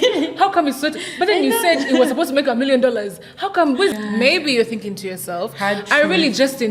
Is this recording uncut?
no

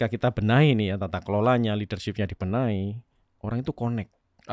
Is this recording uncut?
yes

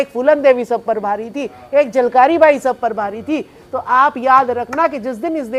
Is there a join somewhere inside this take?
no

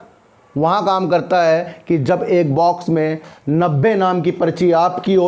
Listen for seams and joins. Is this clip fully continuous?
yes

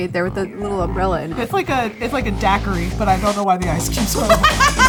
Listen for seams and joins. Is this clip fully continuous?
yes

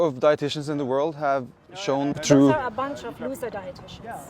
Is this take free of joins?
no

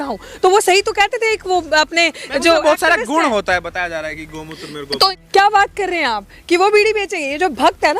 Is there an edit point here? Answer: yes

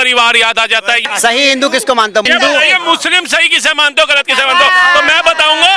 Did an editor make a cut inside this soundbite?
yes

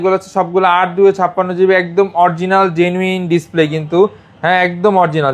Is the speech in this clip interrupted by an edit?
no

